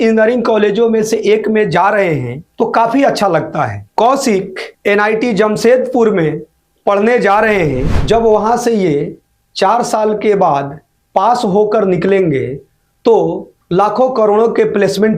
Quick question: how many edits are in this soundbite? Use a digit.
1